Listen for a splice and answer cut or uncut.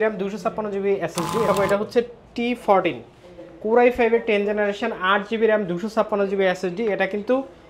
cut